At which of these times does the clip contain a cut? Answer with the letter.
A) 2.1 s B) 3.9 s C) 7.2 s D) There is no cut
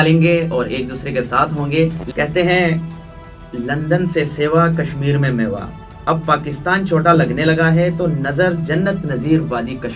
A